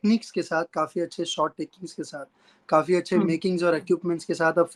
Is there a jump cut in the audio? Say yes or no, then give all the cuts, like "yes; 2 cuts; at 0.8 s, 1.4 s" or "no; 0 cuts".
no; 0 cuts